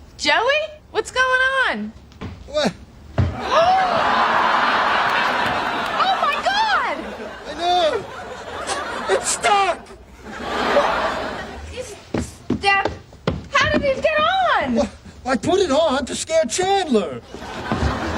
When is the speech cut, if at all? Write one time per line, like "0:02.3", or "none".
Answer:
0:14.6

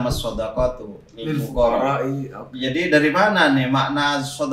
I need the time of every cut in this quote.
none

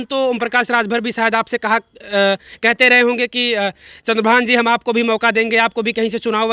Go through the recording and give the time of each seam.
none

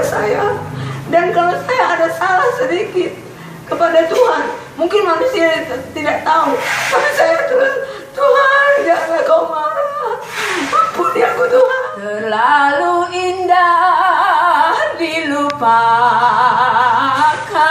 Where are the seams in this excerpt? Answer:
0:12.2

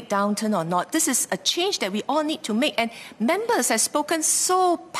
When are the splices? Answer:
none

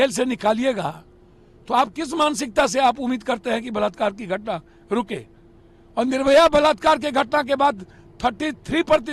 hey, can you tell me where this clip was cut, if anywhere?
none

